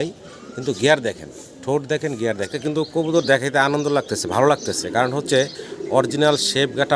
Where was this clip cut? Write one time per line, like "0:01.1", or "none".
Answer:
0:02.5

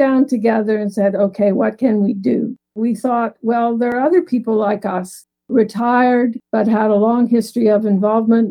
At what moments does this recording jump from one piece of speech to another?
0:02.7

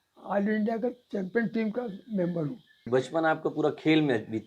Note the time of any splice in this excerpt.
0:02.8

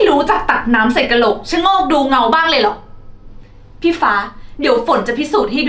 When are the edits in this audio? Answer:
none

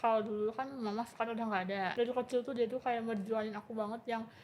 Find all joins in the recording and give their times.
0:01.9

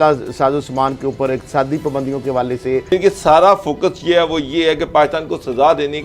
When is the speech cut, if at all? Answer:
0:02.9

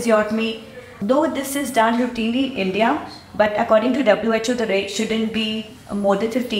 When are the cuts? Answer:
0:00.9

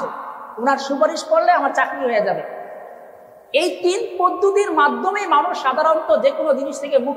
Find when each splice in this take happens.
none

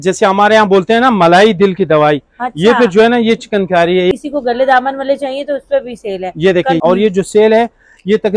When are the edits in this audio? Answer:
0:04.1
0:06.8

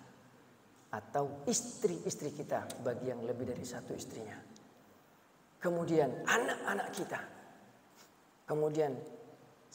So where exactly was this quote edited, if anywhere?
none

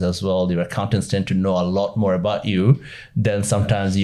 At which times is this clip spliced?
none

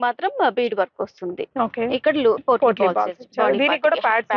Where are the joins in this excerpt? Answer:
0:01.5

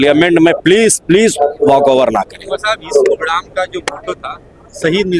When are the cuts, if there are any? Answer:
none

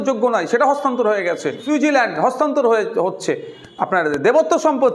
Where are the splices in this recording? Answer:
0:01.6

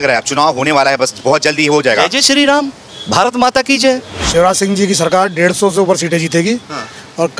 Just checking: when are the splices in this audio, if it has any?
0:04.2

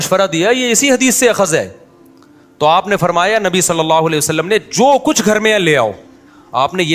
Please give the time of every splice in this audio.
none

